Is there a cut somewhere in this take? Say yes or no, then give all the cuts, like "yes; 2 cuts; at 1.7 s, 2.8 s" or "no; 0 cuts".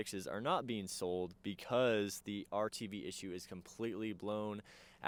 no; 0 cuts